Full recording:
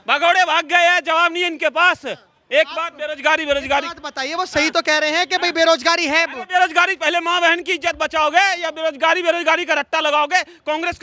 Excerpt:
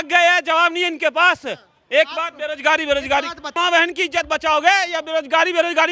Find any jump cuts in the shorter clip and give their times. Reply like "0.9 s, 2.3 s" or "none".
3.5 s